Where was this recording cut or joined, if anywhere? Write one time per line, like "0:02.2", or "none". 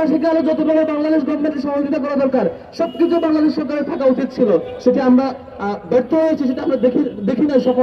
none